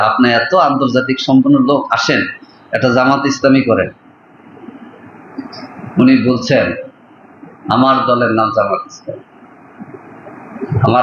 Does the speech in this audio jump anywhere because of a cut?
no; 0 cuts

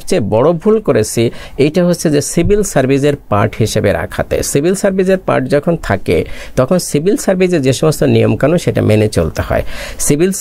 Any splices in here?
no; 0 cuts

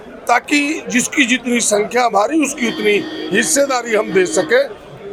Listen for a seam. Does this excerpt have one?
no; 0 cuts

